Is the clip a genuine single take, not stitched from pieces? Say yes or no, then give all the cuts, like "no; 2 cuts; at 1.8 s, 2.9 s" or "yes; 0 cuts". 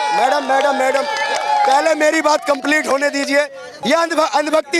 no; 1 cut; at 3.6 s